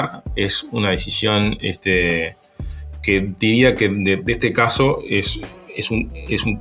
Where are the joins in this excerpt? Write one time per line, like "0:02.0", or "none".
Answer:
none